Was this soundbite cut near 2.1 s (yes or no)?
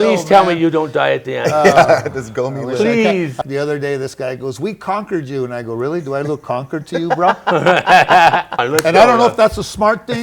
no